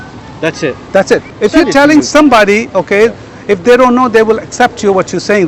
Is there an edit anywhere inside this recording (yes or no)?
yes